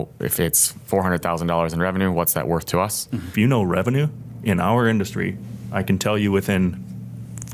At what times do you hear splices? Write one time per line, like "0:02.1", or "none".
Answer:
0:03.3